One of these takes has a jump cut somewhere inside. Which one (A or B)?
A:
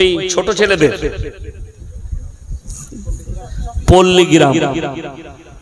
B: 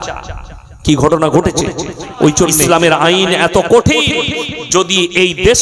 B